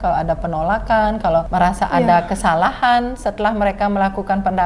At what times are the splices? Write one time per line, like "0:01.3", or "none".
0:01.5